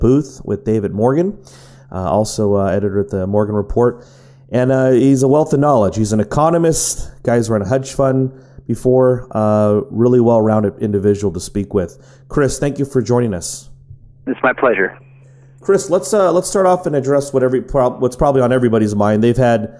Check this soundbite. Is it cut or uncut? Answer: uncut